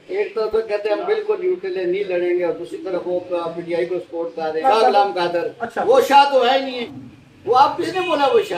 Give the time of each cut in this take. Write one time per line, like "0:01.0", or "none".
0:04.6
0:06.8